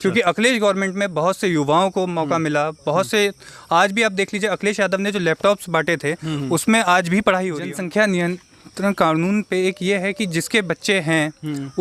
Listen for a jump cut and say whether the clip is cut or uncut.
cut